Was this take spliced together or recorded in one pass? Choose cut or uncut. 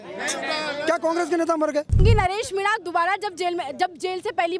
cut